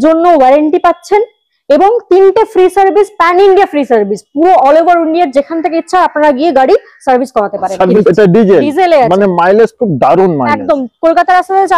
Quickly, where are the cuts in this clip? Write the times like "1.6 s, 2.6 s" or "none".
8.0 s